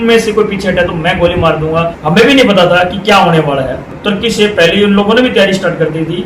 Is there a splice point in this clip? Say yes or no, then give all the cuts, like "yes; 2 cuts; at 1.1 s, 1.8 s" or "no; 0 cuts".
yes; 2 cuts; at 2.0 s, 3.8 s